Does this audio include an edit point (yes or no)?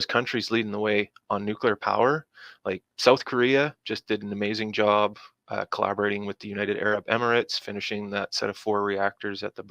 no